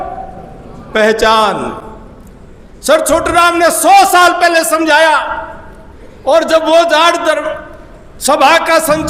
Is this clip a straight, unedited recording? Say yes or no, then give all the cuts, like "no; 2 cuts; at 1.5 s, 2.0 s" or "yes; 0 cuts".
yes; 0 cuts